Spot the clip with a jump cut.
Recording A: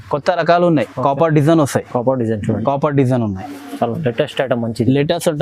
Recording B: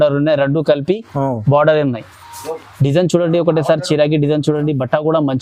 A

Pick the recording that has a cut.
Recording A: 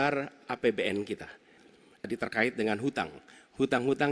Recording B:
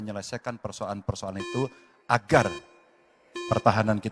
A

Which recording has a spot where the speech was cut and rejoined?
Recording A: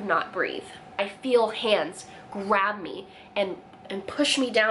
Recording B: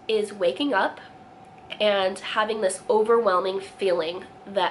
A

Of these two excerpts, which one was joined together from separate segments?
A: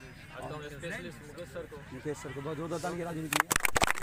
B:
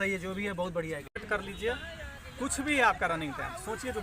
B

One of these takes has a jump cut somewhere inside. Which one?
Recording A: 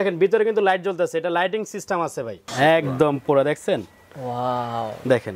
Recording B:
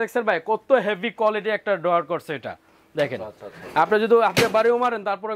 A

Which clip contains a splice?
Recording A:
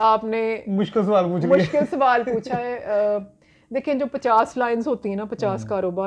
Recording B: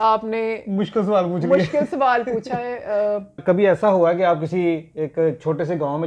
B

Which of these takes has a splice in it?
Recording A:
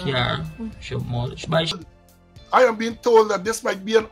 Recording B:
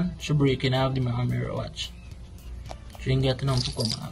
A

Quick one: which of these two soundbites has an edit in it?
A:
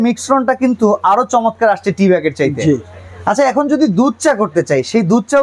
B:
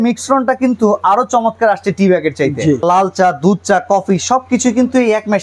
B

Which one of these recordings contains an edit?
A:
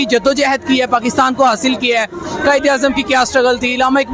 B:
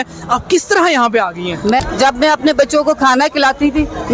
B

